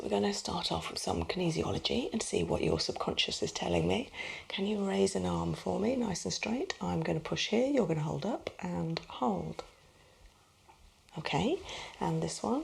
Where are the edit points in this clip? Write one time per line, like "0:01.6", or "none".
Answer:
0:01.0